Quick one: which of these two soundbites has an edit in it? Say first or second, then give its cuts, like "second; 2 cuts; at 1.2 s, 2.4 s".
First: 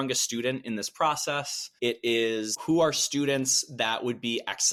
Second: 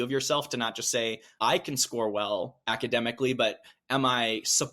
second; 2 cuts; at 1.2 s, 2.6 s